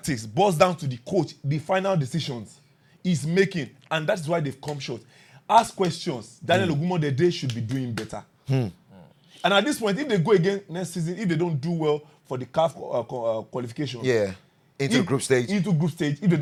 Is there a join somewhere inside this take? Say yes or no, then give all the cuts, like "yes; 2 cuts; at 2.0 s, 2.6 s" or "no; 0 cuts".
no; 0 cuts